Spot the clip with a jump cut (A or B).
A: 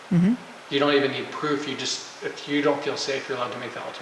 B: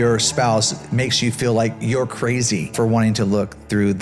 B